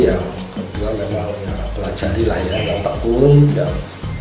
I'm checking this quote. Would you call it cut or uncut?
uncut